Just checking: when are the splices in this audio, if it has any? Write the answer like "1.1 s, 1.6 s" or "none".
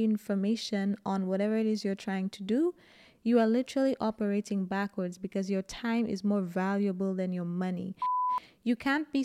8.2 s